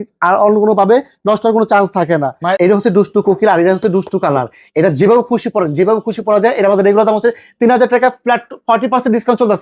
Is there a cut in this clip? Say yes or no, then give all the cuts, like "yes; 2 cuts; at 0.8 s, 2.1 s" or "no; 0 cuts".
yes; 1 cut; at 2.6 s